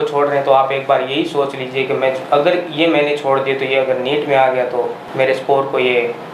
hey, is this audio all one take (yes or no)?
yes